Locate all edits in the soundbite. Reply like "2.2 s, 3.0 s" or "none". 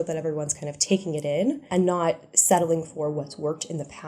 1.6 s